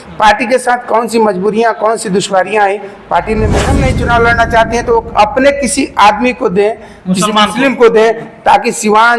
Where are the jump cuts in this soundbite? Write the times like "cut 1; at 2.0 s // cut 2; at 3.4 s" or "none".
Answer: cut 1; at 3.7 s